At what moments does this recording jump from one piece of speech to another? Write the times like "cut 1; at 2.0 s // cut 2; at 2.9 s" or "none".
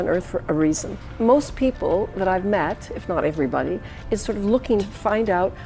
cut 1; at 1.0 s // cut 2; at 4.9 s